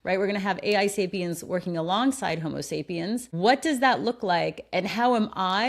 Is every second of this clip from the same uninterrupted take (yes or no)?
no